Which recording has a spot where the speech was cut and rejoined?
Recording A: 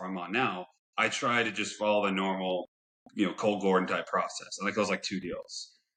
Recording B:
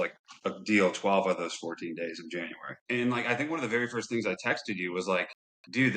B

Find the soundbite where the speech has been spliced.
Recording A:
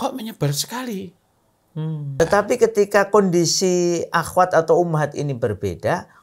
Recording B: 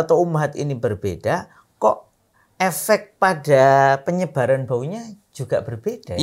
A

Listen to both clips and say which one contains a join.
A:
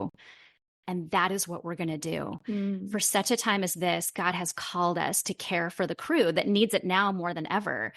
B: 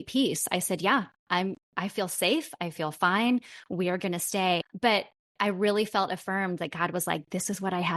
B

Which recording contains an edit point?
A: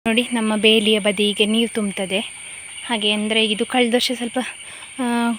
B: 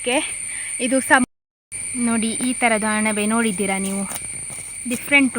B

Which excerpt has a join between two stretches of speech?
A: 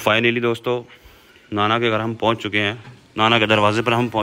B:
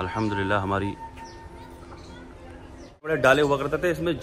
B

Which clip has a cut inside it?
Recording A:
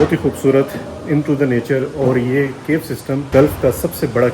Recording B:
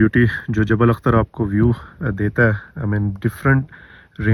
A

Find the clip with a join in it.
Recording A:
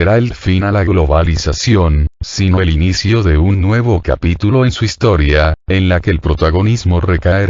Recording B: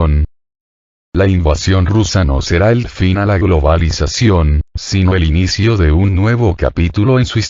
B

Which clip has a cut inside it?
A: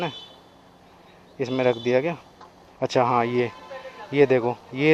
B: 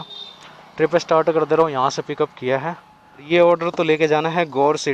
B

